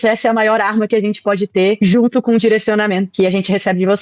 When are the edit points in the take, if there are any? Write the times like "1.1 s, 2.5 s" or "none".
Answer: 1.8 s, 3.1 s

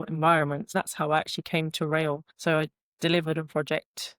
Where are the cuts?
0.7 s, 2.3 s

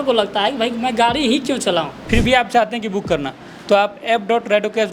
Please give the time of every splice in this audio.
2.0 s

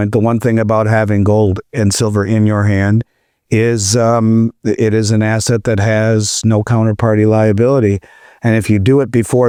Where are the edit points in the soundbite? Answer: none

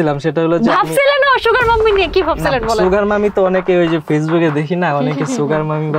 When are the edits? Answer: none

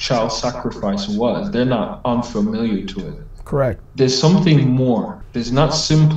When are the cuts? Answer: none

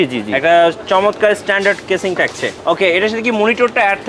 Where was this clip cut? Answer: 2.5 s

